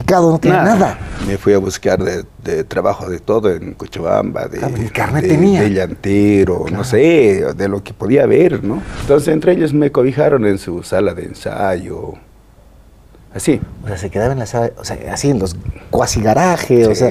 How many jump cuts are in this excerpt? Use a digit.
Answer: 2